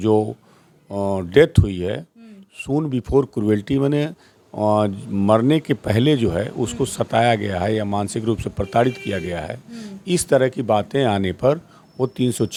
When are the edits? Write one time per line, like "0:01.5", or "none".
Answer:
none